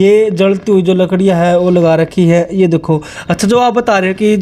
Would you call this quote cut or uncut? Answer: uncut